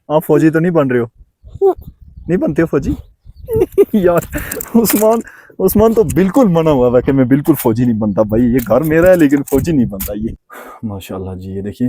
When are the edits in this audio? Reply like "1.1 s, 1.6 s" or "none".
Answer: 10.4 s